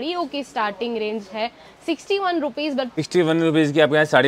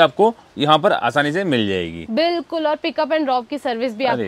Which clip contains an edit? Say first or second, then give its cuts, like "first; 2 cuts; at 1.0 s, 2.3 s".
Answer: first; 1 cut; at 2.9 s